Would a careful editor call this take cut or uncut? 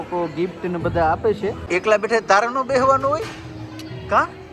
uncut